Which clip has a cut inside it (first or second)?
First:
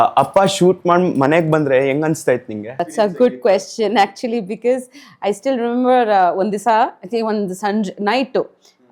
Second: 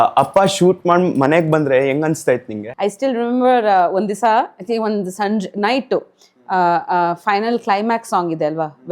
second